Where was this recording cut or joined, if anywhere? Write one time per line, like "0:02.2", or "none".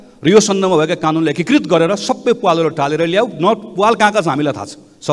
none